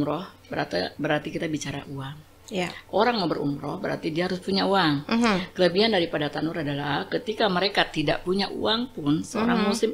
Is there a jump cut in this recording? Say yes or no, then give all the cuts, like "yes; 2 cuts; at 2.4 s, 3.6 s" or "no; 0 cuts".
no; 0 cuts